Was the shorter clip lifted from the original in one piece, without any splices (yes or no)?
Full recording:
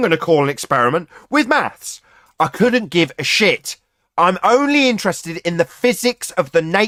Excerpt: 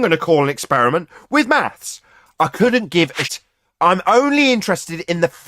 no